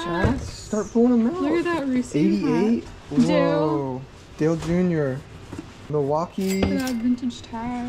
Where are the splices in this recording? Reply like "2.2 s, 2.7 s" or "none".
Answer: 5.9 s